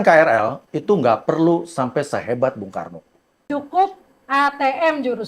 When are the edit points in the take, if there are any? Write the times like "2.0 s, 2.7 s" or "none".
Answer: 3.4 s